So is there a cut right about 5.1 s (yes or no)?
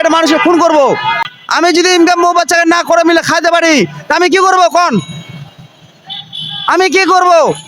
no